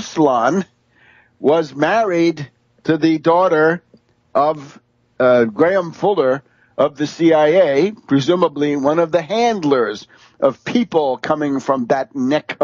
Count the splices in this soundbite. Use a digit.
0